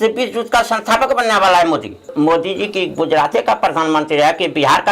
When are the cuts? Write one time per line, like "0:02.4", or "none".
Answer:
0:02.1